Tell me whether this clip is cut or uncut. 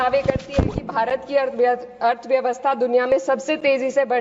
uncut